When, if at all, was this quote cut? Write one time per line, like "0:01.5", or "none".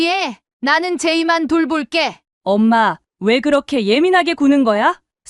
0:02.3